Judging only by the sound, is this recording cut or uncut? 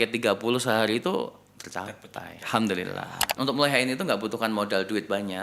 cut